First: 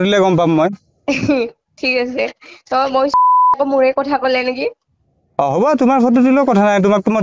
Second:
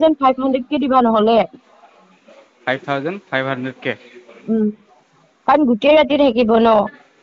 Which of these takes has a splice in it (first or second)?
first